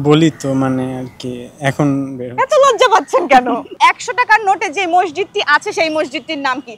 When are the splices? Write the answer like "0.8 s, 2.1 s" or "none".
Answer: 3.7 s